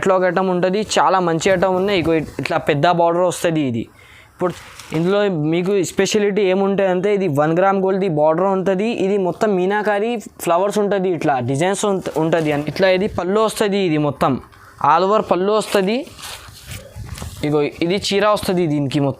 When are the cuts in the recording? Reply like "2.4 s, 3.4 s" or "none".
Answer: 4.4 s, 12.7 s